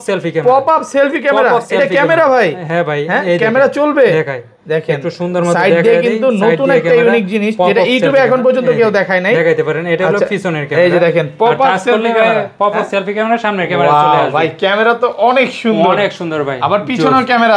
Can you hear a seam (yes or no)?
no